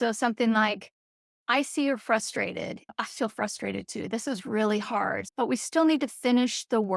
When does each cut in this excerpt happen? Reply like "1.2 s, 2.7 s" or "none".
2.9 s, 5.3 s